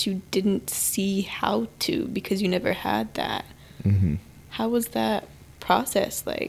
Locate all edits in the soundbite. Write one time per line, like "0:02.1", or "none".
none